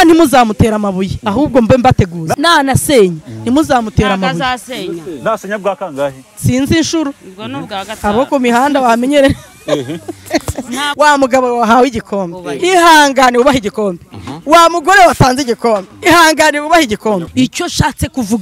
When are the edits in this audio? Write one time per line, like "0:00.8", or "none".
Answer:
0:02.3
0:10.9
0:17.3